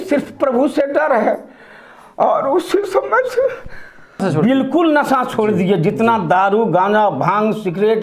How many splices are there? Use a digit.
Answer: 1